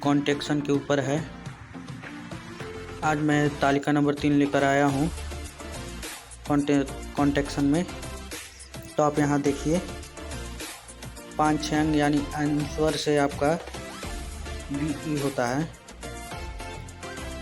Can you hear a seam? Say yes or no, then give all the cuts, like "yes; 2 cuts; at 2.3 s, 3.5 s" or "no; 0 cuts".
yes; 4 cuts; at 5.1 s, 6.5 s, 9.9 s, 11.4 s